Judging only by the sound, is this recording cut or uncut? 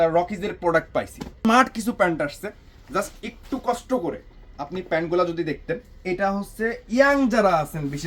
cut